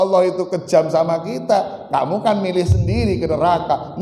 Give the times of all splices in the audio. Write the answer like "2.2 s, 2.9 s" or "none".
none